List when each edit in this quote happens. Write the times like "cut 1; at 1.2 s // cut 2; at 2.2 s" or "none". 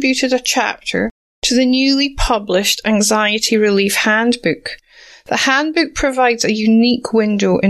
none